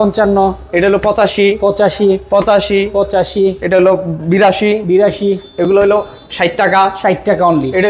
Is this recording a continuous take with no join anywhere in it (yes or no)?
yes